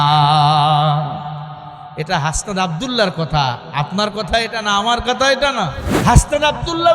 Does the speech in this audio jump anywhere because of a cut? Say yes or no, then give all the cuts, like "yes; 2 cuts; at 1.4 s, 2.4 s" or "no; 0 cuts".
yes; 1 cut; at 5.9 s